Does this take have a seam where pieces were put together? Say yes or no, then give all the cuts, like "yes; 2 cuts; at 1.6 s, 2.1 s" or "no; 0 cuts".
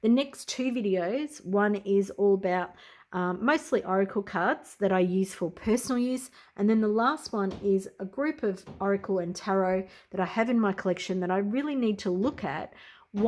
no; 0 cuts